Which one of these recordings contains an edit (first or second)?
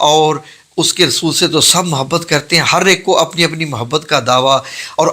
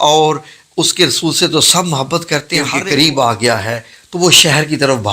second